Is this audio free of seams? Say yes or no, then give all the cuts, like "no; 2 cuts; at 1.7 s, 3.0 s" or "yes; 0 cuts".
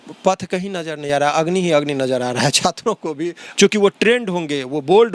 no; 1 cut; at 3.4 s